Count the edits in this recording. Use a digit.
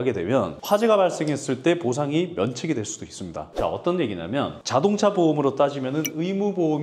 0